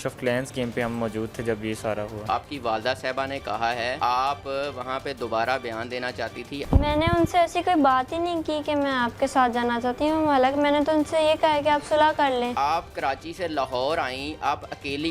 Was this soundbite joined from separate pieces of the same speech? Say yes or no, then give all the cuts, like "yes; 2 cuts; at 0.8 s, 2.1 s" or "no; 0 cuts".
yes; 4 cuts; at 2.3 s, 4.0 s, 6.6 s, 12.6 s